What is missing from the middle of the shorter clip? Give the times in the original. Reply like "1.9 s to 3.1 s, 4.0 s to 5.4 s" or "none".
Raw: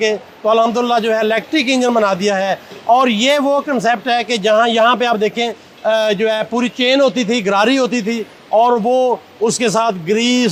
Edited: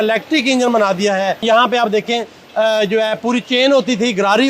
2.6 s to 4.7 s